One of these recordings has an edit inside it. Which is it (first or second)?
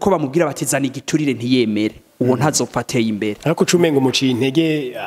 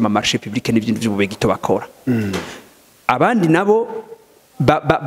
first